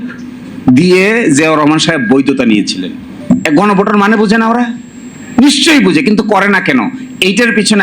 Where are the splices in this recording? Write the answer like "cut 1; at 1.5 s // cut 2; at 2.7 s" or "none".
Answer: cut 1; at 3.2 s